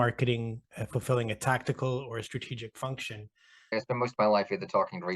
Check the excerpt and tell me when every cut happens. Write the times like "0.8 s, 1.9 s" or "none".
3.7 s